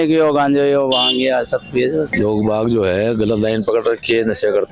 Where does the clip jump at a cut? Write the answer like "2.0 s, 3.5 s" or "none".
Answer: 2.1 s